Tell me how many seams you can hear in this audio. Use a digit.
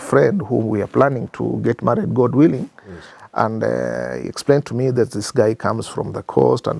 0